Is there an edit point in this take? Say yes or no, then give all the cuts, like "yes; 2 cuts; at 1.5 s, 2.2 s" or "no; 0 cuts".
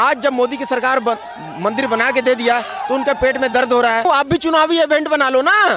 yes; 1 cut; at 4.1 s